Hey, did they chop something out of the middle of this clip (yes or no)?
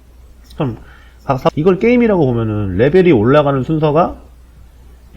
yes